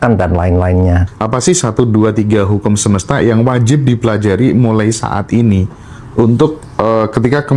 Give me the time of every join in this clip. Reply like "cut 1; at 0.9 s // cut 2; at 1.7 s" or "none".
cut 1; at 1.1 s